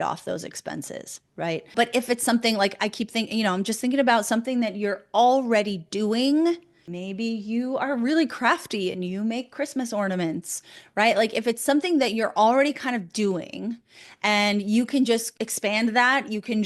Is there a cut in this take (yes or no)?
no